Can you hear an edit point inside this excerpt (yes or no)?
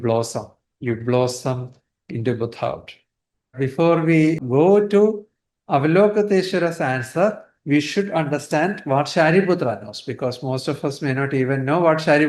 yes